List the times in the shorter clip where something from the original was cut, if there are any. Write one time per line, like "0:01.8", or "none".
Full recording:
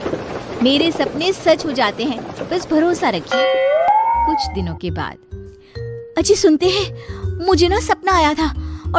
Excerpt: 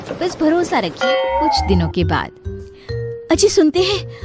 0:01.4